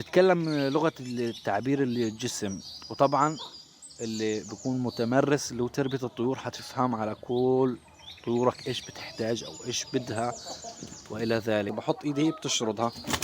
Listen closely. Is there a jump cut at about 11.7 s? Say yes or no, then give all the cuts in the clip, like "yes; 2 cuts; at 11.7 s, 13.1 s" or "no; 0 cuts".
yes; 1 cut; at 11.7 s